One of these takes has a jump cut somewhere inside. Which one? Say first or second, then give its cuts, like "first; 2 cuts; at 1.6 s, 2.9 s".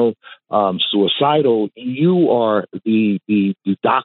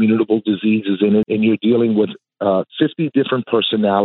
second; 1 cut; at 1.2 s